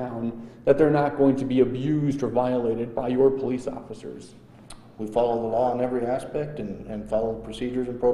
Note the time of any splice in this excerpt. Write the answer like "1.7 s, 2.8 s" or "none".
none